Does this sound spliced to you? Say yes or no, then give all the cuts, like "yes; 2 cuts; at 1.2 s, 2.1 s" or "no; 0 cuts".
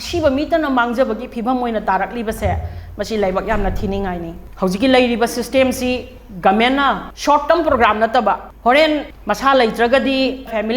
no; 0 cuts